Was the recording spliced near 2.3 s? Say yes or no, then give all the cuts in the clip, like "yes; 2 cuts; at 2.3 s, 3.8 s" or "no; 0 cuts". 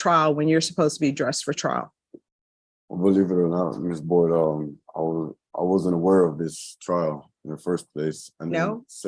no; 0 cuts